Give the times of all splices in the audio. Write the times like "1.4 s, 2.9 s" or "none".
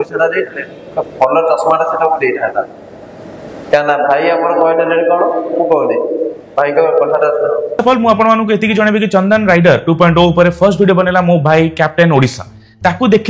none